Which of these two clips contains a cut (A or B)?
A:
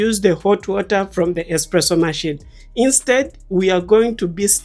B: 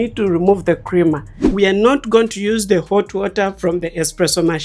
B